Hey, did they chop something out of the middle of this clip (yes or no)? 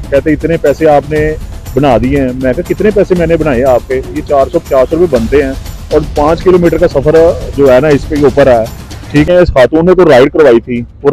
yes